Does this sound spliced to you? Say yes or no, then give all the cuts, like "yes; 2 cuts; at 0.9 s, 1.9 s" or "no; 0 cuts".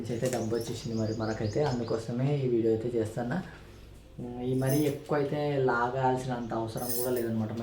no; 0 cuts